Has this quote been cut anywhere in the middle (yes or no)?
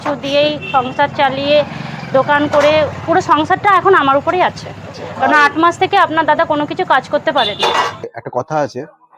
yes